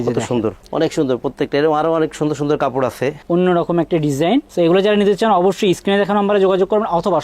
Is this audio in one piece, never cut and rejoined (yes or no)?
no